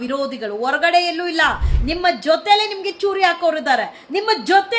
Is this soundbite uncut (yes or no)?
yes